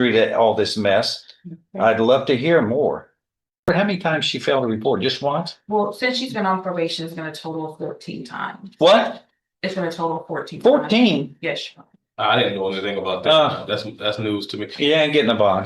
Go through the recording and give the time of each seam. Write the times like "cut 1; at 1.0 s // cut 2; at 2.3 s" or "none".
cut 1; at 3.7 s